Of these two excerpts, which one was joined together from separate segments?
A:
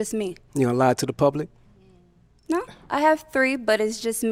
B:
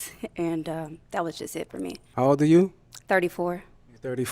B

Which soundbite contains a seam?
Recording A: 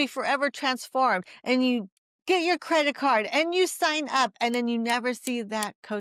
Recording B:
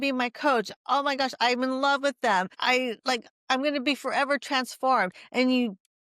B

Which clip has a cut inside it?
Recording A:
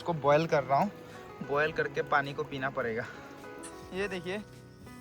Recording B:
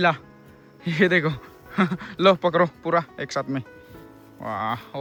A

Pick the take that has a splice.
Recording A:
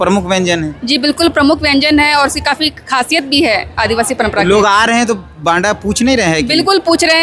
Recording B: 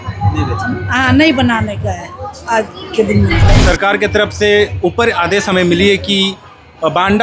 B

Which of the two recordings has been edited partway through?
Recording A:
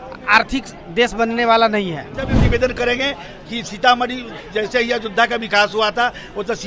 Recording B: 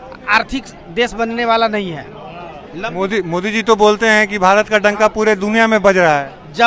A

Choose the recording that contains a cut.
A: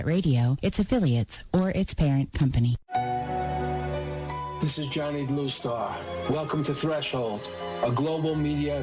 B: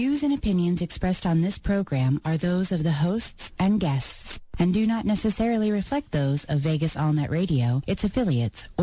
A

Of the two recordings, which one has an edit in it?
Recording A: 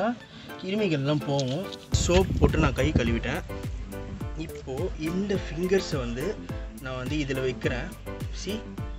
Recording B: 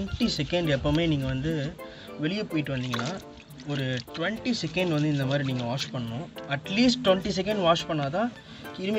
A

